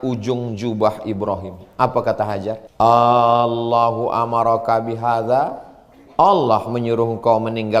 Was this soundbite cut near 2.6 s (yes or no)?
yes